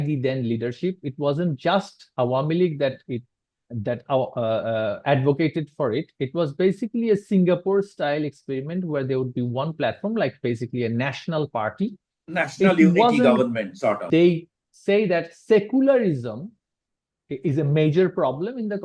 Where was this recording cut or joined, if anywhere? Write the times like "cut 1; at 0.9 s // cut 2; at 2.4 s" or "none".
cut 1; at 14.0 s